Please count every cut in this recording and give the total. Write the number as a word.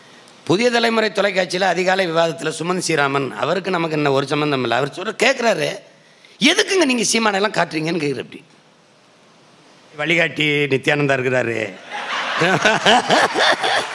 one